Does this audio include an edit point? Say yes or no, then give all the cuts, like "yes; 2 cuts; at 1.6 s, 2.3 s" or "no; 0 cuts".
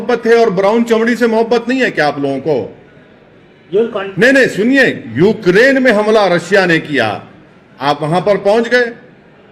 no; 0 cuts